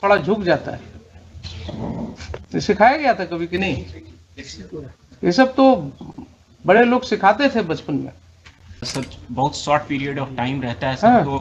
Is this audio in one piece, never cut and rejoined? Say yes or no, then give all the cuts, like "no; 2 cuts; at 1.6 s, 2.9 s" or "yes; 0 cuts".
no; 2 cuts; at 2.4 s, 8.9 s